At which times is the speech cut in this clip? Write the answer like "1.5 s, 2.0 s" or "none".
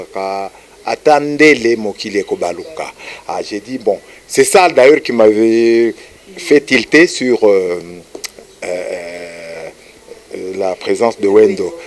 none